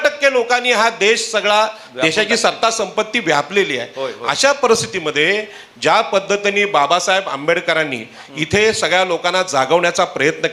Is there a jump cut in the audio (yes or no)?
no